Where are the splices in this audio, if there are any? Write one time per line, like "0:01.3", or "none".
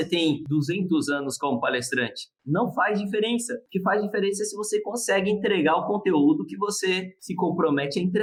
none